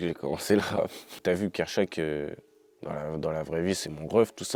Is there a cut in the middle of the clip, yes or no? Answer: yes